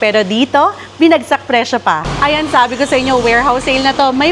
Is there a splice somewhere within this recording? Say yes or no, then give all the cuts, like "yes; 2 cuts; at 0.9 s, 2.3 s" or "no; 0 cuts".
yes; 1 cut; at 2.1 s